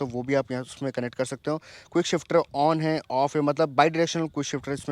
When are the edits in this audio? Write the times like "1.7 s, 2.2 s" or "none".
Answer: none